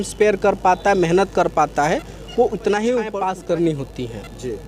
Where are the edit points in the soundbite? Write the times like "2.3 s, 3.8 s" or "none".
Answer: 3.2 s